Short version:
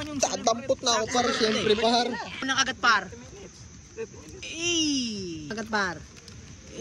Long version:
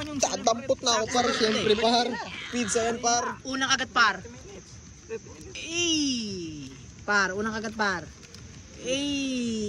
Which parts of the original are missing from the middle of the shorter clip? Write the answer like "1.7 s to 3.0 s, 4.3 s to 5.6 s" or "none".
2.4 s to 3.5 s, 6.6 s to 7.6 s